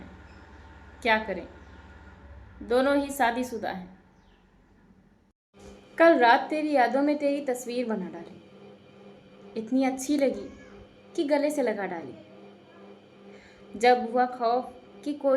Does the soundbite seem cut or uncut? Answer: cut